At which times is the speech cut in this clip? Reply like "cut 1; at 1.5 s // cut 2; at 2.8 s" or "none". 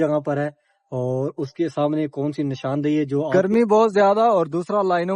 cut 1; at 3.3 s